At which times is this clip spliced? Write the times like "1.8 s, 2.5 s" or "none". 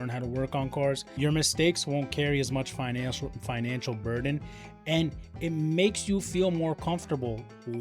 1.1 s